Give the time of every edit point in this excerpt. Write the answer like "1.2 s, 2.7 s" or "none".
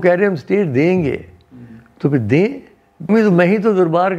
3.0 s